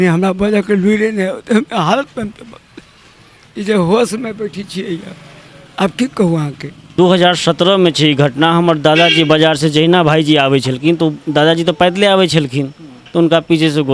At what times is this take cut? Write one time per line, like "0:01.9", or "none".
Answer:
0:06.9